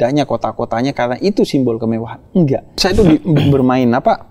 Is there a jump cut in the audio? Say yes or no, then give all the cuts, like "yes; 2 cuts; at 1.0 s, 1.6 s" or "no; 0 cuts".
yes; 1 cut; at 2.7 s